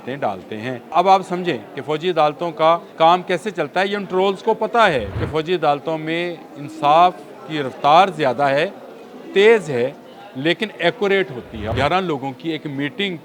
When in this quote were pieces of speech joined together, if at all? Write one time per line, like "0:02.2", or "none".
0:00.9
0:02.9
0:05.2
0:11.7